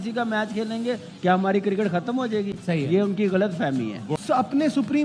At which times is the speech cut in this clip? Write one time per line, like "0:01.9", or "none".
0:04.0